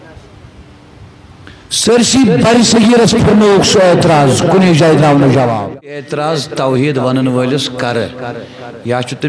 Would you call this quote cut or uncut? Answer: cut